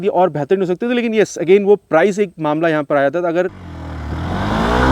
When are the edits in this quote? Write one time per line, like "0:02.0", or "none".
0:03.5